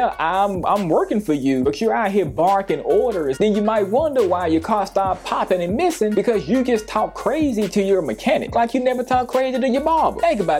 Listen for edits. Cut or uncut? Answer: cut